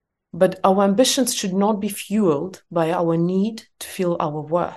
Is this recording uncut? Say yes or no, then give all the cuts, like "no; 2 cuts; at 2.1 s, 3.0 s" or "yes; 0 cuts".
yes; 0 cuts